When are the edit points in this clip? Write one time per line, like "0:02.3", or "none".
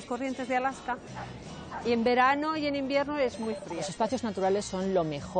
0:03.8